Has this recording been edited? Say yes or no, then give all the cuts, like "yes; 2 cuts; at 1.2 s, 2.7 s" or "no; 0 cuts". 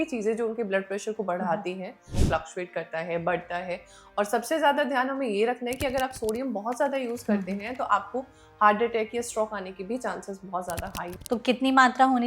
yes; 2 cuts; at 2.1 s, 11.2 s